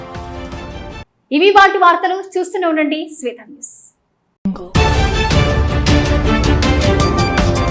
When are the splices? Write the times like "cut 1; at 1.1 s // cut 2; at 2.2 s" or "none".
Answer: none